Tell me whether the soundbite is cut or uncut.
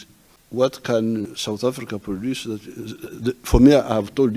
uncut